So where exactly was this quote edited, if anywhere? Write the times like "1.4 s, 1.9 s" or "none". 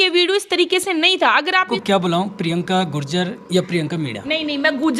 1.7 s